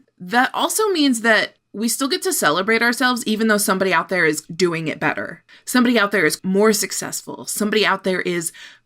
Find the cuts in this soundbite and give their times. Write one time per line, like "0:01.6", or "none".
0:04.5
0:06.4